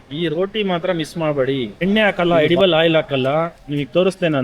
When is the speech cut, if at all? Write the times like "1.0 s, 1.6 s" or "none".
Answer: 1.8 s